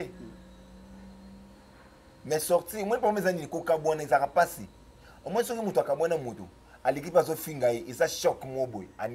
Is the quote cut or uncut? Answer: uncut